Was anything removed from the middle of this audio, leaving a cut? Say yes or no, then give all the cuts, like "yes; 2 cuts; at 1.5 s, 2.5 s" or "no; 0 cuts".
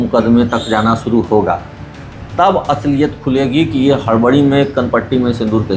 no; 0 cuts